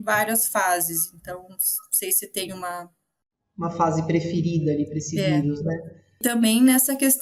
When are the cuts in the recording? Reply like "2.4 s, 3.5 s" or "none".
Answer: 6.2 s